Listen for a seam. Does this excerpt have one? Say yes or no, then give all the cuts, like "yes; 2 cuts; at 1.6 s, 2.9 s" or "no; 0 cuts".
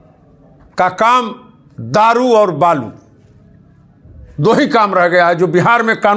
no; 0 cuts